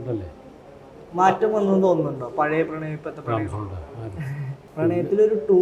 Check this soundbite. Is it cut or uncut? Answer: cut